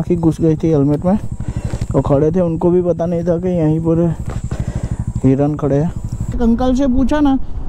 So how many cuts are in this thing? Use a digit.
1